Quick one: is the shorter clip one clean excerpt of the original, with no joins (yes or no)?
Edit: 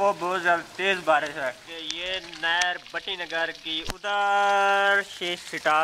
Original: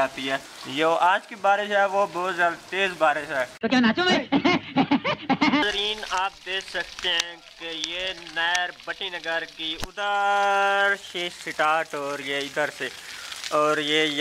no